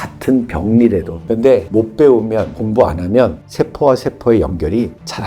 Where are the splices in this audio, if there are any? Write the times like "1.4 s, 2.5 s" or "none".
1.2 s